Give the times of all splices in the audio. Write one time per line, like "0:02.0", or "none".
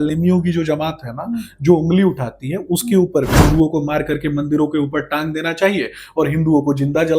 0:03.3

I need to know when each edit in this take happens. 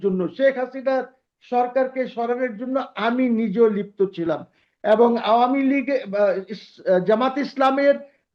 none

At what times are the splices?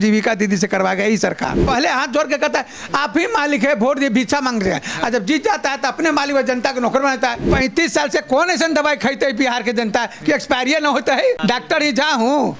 0:01.6
0:07.4
0:11.4

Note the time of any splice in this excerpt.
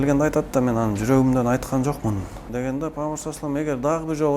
0:02.5

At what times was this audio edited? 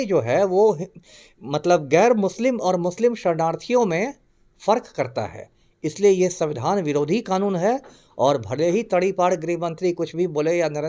none

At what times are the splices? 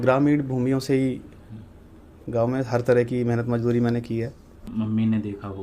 0:04.6

